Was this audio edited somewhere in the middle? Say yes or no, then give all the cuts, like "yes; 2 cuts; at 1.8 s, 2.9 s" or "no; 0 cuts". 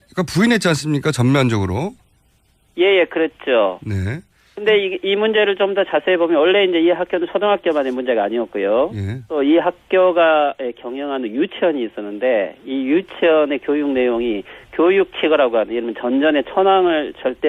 yes; 1 cut; at 5.7 s